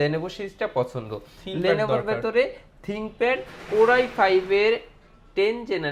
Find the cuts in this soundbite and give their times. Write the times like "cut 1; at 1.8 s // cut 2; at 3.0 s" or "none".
none

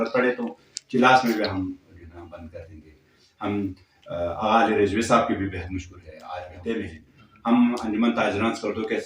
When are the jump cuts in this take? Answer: cut 1; at 6.5 s

